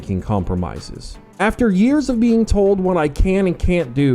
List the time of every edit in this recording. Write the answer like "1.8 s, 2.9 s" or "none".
1.3 s

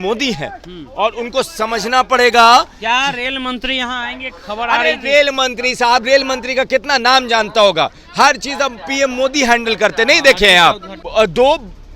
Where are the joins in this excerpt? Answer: 10.9 s

